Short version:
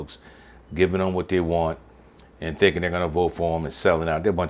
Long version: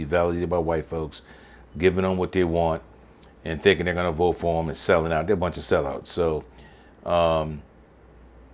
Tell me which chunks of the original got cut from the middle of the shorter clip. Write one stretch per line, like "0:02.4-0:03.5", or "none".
none